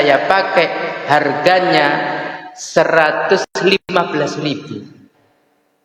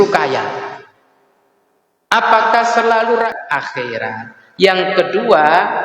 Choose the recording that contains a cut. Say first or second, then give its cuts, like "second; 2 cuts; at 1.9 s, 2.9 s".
second; 1 cut; at 3.3 s